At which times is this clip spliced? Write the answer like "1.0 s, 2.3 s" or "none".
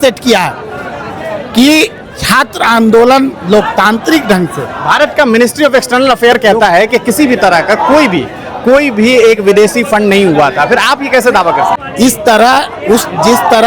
11.8 s